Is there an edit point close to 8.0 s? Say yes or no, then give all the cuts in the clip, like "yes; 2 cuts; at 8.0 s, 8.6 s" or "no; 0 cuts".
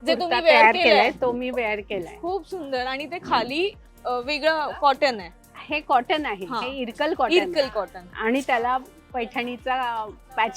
no; 0 cuts